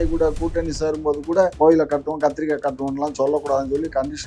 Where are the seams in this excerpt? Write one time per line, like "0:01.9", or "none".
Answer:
0:01.5